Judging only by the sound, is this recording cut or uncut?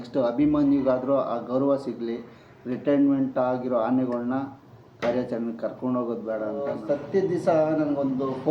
cut